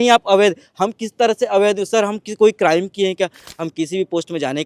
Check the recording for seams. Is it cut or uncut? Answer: cut